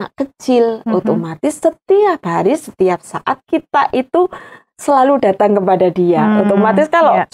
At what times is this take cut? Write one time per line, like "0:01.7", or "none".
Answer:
none